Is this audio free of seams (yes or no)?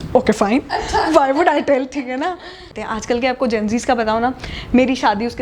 no